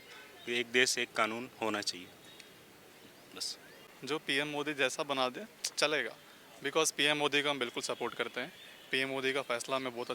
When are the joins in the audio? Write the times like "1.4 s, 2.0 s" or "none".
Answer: 3.9 s

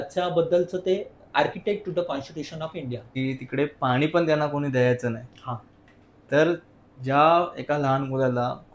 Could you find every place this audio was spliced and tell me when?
3.1 s

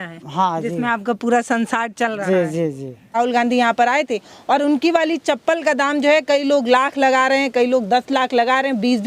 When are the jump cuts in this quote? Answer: 3.2 s

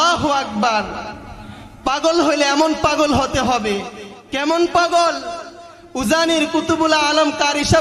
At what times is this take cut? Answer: none

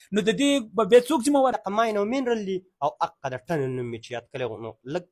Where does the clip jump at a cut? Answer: 1.6 s

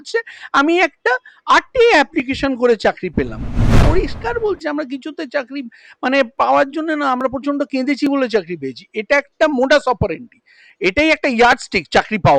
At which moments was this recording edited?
3.8 s

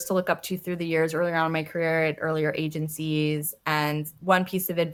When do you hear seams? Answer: none

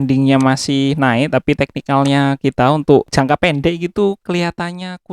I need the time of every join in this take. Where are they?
3.1 s

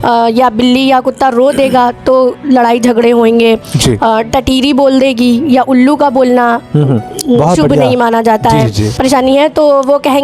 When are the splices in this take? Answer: 8.8 s

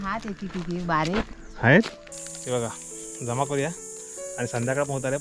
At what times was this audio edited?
2.0 s

